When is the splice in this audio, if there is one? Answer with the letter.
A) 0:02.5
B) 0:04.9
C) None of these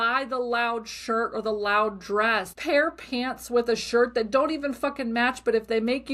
A